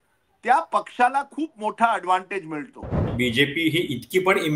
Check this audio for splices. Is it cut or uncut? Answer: cut